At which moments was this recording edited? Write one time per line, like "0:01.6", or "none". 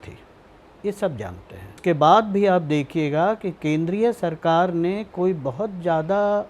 0:01.7

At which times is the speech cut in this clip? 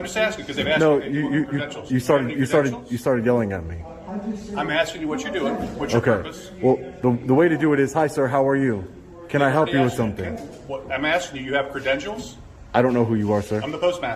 none

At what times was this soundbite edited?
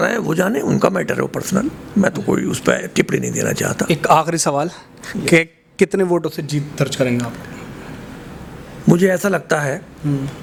none

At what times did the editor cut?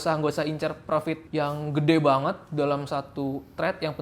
0:01.2

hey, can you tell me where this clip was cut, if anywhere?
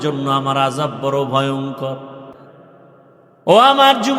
0:02.2

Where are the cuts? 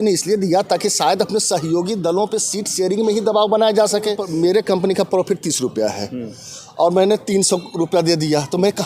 0:04.2

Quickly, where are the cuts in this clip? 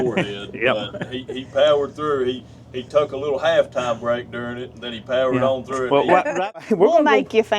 0:06.6

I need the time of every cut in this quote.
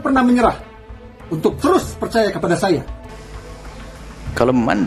none

